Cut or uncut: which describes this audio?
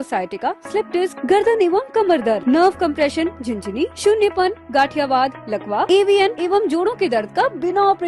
uncut